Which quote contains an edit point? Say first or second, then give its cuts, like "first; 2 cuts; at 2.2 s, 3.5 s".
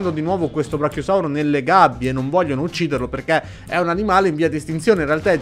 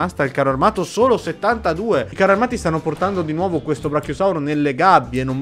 second; 1 cut; at 2.1 s